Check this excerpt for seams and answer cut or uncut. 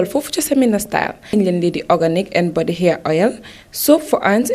cut